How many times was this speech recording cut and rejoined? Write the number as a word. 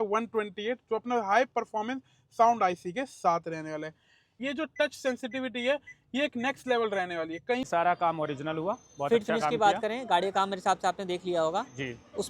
two